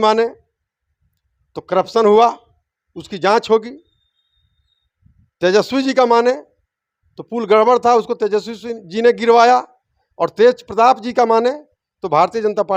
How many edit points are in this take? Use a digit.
0